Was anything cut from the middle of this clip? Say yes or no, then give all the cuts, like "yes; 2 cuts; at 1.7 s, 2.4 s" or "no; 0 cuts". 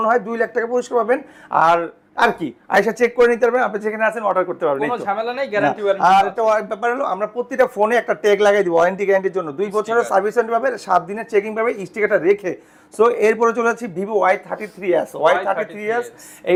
no; 0 cuts